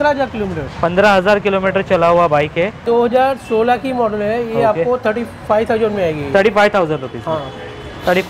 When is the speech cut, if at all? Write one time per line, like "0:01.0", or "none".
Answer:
0:02.8